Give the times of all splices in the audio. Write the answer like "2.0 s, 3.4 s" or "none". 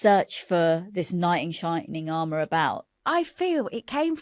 3.0 s